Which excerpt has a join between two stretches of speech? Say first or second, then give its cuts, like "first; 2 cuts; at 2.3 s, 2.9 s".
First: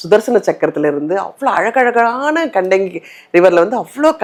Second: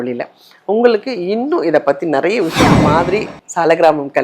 second; 1 cut; at 2.8 s